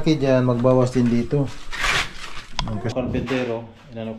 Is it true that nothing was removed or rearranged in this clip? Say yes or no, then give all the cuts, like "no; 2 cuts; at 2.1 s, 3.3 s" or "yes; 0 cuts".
no; 1 cut; at 2.9 s